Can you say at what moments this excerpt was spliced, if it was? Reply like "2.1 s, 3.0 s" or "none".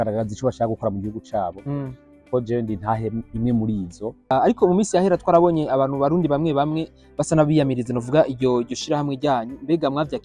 4.3 s